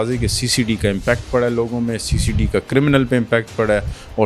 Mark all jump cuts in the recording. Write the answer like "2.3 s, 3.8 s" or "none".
none